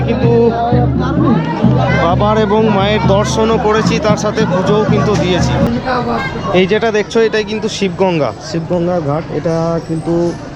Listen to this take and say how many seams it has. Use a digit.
1